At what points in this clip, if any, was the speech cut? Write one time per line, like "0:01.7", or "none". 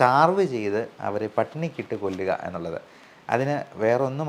none